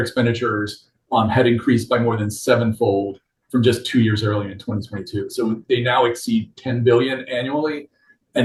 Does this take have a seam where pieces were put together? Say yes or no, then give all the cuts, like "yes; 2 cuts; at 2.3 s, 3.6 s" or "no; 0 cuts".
no; 0 cuts